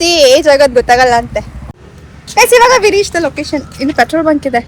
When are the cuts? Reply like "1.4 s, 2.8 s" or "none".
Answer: 1.7 s